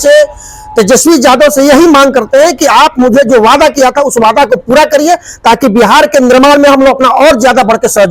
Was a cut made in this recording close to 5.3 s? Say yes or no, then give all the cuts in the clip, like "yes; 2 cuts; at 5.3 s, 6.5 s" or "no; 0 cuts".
no; 0 cuts